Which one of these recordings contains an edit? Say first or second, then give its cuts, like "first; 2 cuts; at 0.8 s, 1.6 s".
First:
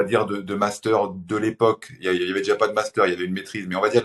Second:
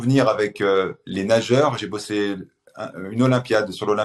second; 1 cut; at 1.0 s